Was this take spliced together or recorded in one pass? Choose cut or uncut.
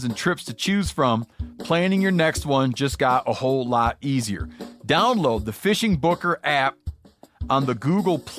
uncut